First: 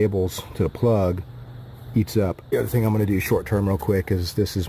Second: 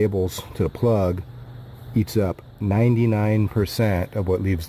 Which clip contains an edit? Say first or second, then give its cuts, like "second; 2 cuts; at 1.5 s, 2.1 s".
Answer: second; 1 cut; at 2.5 s